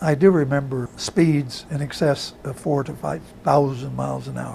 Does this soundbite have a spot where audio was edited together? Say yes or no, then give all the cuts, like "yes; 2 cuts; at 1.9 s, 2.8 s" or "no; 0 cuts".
yes; 1 cut; at 1.0 s